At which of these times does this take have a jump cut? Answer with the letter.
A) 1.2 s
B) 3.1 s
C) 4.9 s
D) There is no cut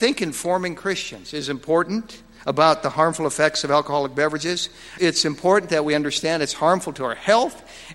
C